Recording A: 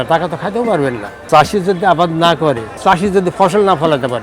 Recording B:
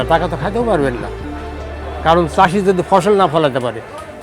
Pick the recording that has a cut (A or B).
A